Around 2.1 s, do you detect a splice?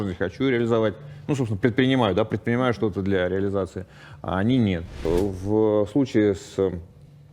no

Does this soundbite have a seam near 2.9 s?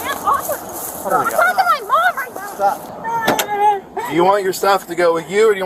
yes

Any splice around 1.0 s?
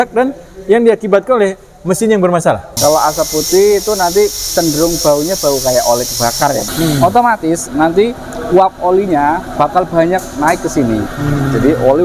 no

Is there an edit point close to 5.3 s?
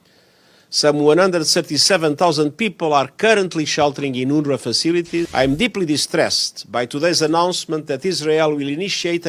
yes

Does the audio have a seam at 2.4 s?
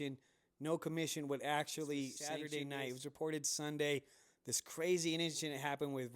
yes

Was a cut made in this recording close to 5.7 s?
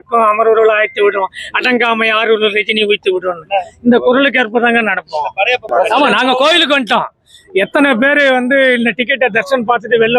yes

